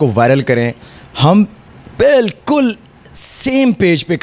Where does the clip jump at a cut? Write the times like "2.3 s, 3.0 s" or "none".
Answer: none